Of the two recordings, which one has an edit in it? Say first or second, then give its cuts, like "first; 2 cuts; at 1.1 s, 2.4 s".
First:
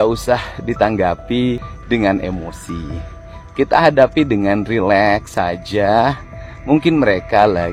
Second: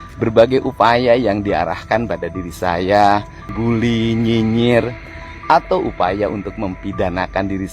second; 1 cut; at 3.5 s